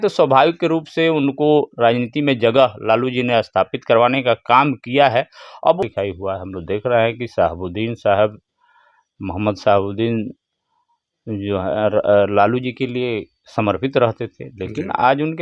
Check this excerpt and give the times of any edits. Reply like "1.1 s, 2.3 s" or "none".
5.8 s